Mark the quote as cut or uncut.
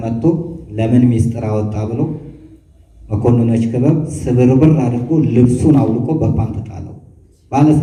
uncut